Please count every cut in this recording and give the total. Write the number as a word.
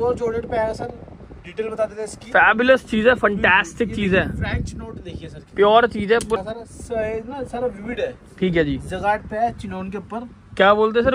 one